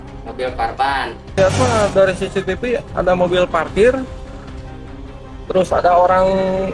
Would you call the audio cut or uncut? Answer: cut